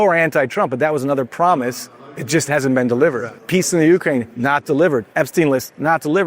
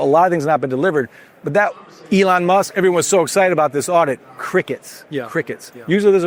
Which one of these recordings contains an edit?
first; 1 cut; at 3.3 s

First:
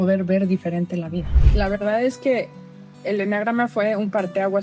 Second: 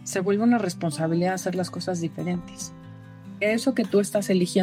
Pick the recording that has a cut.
first; 1 cut; at 1.4 s

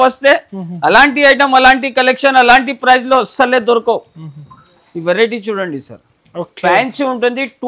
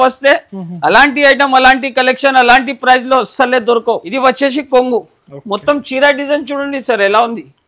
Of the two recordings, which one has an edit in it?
second; 1 cut; at 4.1 s

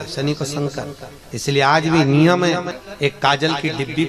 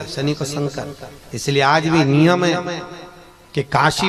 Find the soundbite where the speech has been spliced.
first; 1 cut; at 2.8 s

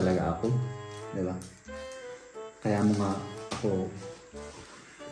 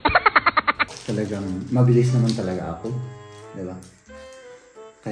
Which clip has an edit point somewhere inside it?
second; 1 cut; at 0.9 s

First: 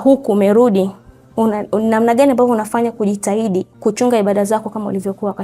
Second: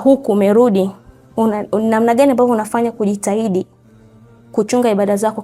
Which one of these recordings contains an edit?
first; 1 cut; at 3.7 s

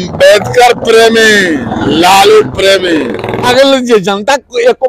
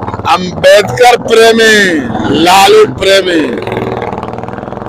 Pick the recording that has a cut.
first; 1 cut; at 3.5 s

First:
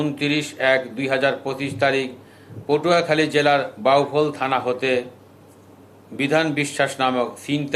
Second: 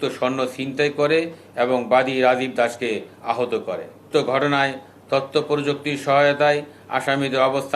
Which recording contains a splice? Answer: second; 1 cut; at 4.1 s

